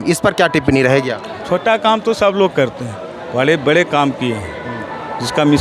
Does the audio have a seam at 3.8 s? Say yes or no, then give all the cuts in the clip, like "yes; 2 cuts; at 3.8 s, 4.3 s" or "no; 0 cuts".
no; 1 cut; at 1.4 s